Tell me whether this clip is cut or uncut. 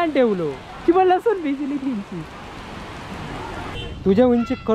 cut